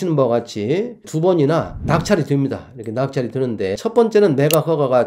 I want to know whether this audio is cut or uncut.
cut